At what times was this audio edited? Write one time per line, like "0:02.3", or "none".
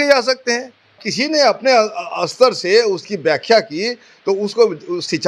0:01.1